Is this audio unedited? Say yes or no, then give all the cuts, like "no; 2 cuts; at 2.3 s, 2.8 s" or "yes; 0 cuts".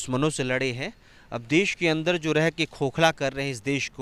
yes; 0 cuts